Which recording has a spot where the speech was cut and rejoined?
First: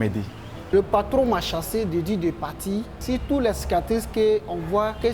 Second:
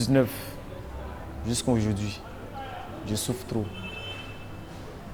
first; 2 cuts; at 0.7 s, 2.9 s

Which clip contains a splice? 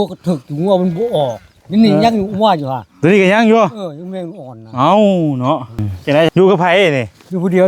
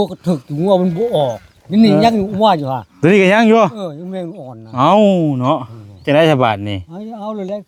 first; 1 cut; at 6.3 s

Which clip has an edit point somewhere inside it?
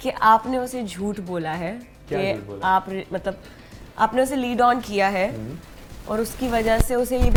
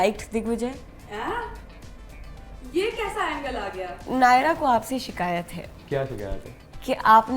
second; 1 cut; at 4.0 s

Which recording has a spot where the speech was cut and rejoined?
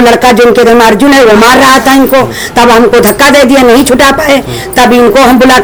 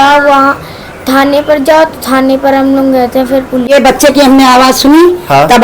second; 1 cut; at 3.7 s

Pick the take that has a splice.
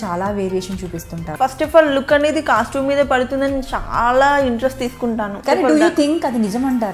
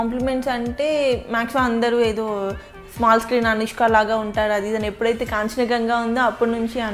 first; 2 cuts; at 1.3 s, 5.4 s

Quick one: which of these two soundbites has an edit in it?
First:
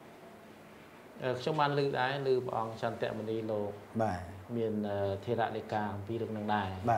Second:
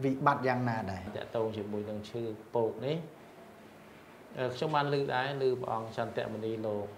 second; 1 cut; at 1.1 s

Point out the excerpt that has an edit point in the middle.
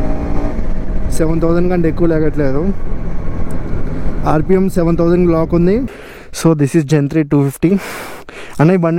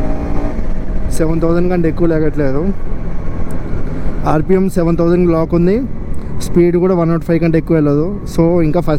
first; 1 cut; at 6.4 s

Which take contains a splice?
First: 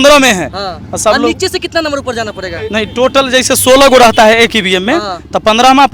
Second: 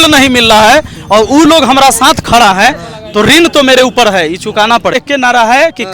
second; 1 cut; at 5.0 s

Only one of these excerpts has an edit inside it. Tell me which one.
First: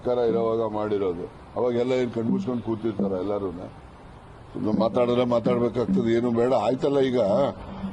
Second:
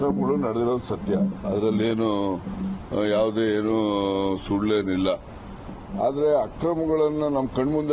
first; 1 cut; at 2.8 s

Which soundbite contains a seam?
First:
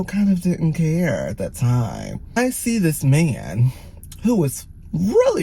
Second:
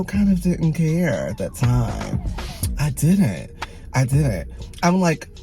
first; 1 cut; at 2.4 s

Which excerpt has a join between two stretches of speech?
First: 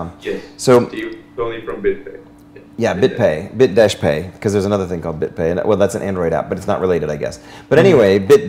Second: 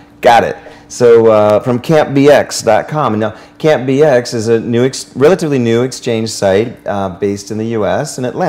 second; 1 cut; at 2.2 s

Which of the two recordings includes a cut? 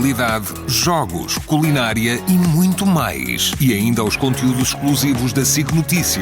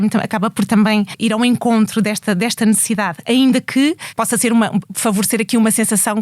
second; 3 cuts; at 1.1 s, 4.1 s, 4.9 s

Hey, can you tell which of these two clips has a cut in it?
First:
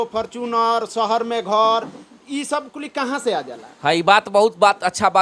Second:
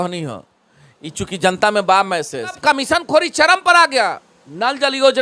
second; 1 cut; at 2.6 s

